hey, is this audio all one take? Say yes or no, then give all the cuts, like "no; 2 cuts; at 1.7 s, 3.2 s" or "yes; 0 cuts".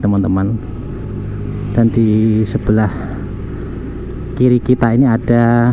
yes; 0 cuts